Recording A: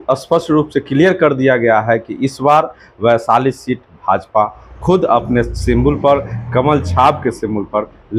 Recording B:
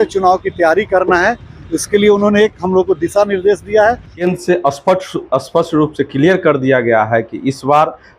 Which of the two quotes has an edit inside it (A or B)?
B